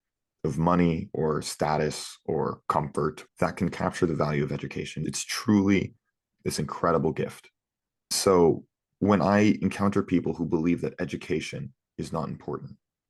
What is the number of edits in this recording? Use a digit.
2